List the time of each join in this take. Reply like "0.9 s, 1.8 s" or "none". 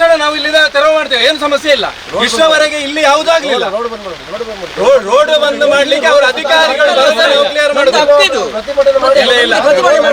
none